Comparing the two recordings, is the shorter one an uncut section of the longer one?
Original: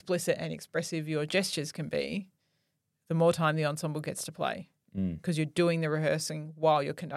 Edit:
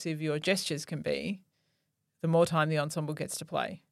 yes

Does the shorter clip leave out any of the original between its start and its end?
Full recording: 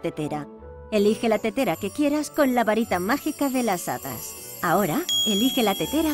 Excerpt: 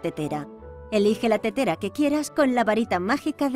no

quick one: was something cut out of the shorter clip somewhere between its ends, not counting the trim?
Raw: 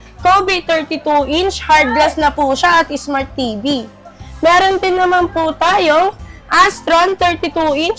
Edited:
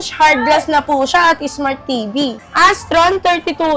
yes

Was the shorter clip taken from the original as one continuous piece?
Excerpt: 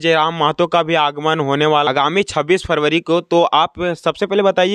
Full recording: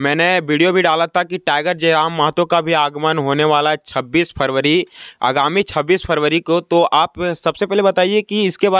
no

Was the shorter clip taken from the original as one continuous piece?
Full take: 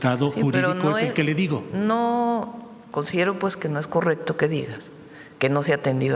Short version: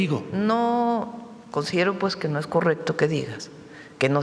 yes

